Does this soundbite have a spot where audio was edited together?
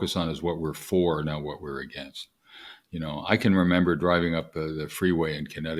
no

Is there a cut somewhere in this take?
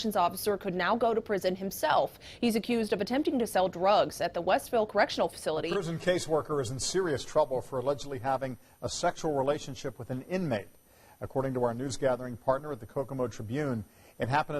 yes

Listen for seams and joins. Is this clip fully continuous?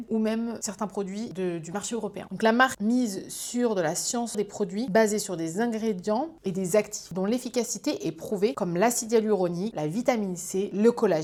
yes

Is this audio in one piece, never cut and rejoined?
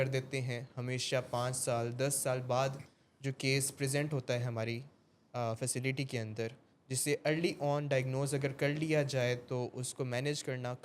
yes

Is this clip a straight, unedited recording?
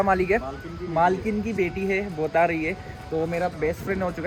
yes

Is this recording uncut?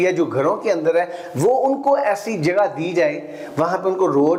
yes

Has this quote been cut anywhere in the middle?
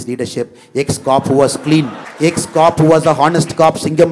yes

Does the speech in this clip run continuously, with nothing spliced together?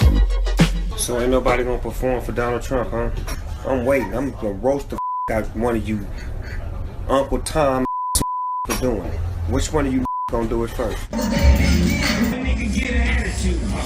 no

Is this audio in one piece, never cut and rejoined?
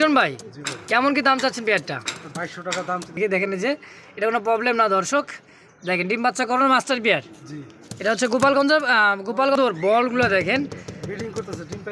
no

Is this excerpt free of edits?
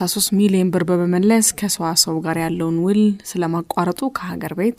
yes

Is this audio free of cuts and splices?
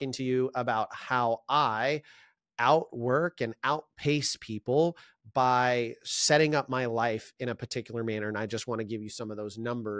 yes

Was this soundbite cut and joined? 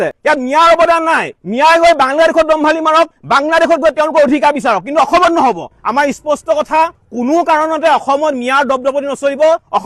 yes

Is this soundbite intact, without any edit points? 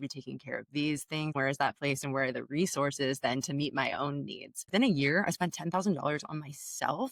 no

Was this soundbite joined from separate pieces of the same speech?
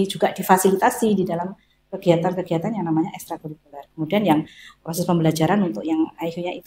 no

